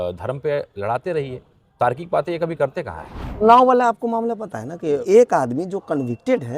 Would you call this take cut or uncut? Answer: cut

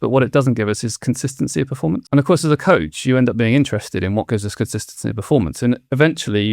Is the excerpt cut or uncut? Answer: cut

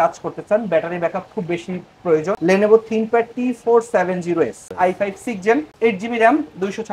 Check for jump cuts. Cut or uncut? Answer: cut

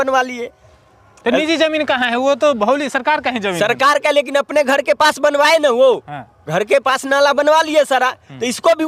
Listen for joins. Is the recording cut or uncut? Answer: uncut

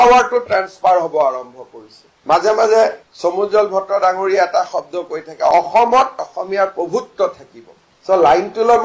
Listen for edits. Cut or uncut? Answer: uncut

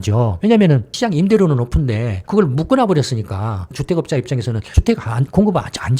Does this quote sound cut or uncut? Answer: cut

